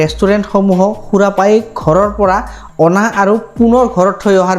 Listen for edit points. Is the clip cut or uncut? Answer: uncut